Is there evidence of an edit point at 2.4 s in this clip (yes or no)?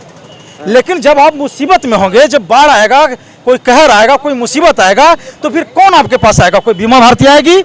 no